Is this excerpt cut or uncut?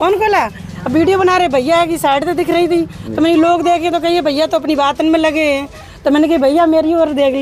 uncut